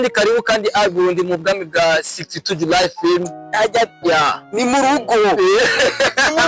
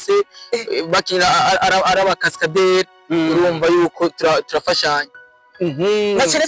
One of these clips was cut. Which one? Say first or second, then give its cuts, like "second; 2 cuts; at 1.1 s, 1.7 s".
second; 1 cut; at 5.4 s